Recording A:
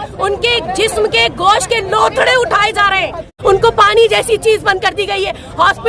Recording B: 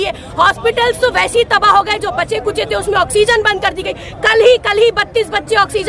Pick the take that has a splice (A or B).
A